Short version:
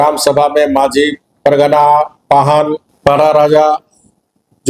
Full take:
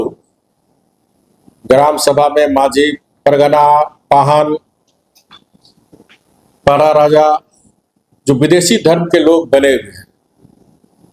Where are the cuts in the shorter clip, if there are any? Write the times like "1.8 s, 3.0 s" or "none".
2.9 s

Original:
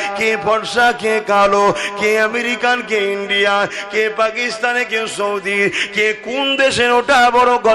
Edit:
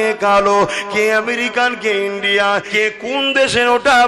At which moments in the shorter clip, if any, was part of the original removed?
2.7 s

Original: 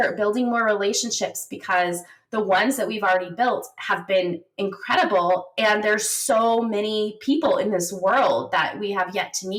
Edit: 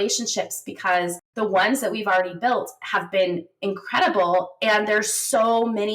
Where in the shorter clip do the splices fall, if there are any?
1.2 s

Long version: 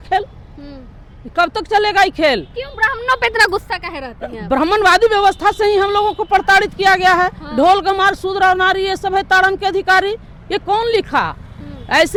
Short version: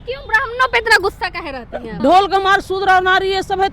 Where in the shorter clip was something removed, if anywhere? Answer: 1.9 s

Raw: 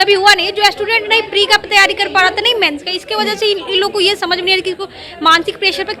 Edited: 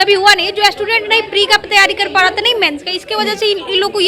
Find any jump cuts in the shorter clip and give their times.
none

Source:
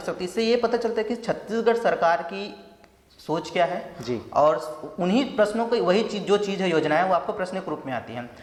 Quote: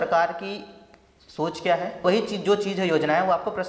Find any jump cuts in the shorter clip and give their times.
2.0 s

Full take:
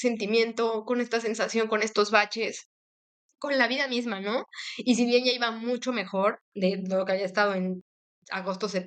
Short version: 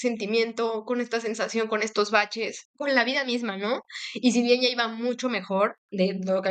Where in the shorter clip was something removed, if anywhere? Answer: 2.6 s

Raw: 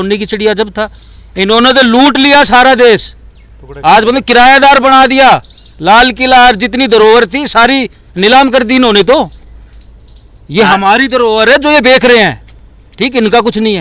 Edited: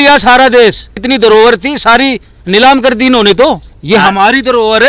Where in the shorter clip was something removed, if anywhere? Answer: 1.0 s, 3.7 s

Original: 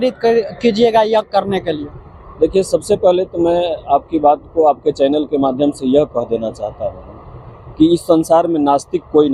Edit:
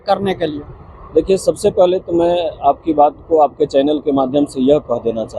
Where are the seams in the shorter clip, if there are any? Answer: none

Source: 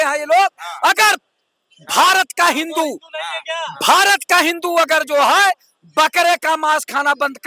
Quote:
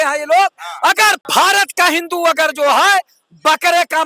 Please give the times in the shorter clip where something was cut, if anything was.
1.2 s

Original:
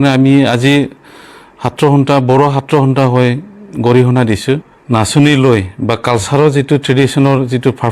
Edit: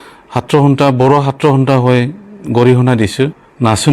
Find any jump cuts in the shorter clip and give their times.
none

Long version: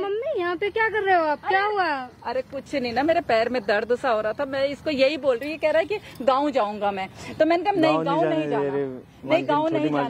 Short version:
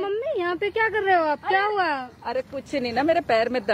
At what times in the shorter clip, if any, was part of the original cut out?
none

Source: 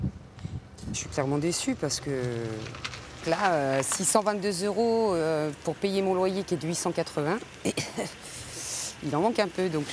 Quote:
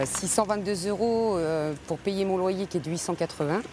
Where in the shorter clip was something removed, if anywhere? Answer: none

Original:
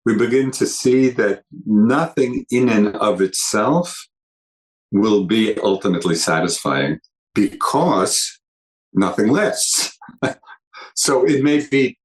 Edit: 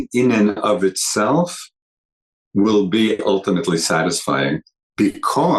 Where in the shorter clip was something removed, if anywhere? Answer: none

